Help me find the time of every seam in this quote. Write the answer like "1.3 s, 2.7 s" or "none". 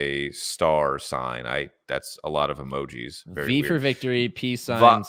none